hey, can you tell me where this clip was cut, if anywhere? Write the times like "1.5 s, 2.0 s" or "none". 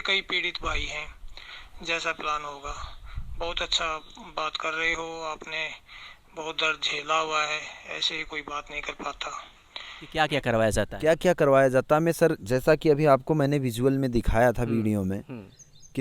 10.1 s